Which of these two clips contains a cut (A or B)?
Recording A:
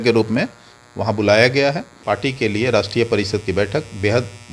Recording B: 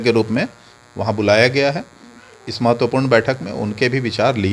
A